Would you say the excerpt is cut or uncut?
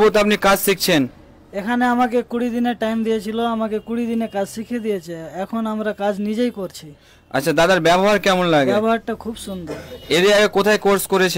uncut